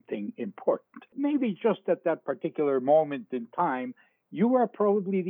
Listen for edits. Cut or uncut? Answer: cut